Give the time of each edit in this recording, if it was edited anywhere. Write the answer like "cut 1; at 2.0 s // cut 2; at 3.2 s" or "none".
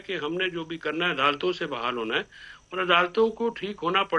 none